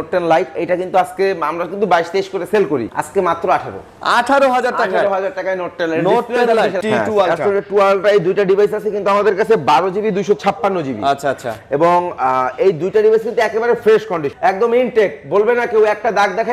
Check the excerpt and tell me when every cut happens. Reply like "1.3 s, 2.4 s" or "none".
3.0 s, 6.8 s, 14.3 s